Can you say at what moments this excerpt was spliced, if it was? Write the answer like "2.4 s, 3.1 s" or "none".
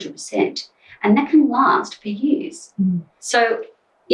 3.1 s